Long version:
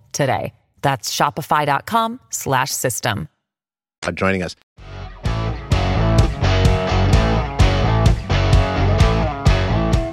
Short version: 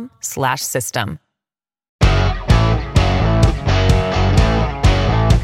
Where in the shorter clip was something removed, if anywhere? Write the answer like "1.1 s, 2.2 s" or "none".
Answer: 1.8 s